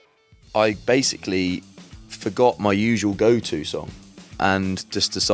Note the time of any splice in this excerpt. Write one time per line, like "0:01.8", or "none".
0:04.3